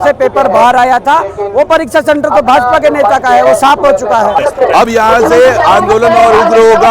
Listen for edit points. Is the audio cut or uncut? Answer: cut